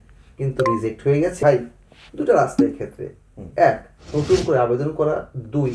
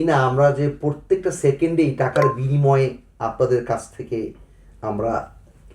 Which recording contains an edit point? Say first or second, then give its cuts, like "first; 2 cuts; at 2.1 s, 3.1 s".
first; 1 cut; at 1.4 s